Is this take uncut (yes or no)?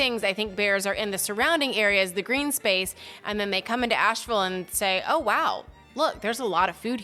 yes